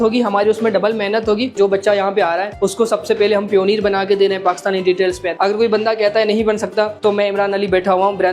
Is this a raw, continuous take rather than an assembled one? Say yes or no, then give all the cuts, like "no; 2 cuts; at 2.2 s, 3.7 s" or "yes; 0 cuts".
no; 2 cuts; at 1.6 s, 5.3 s